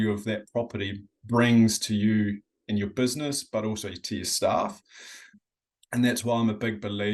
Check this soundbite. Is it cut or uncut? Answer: uncut